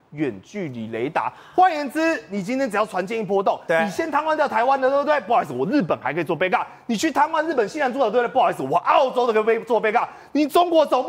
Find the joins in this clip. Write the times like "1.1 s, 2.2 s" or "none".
none